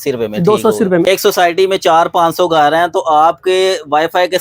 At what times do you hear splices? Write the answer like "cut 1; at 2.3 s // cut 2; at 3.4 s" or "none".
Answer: cut 1; at 1.1 s